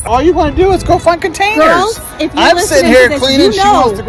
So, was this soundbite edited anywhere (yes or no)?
no